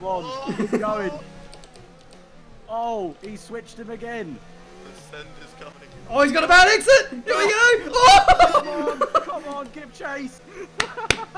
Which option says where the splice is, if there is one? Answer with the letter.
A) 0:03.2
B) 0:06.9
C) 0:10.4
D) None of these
C